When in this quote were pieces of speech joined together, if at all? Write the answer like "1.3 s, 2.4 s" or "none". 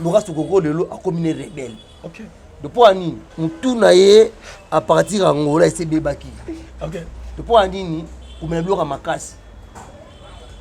none